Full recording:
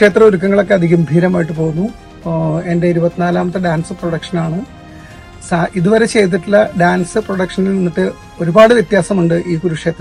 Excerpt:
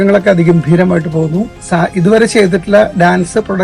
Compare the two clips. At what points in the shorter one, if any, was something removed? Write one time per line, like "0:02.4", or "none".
0:01.6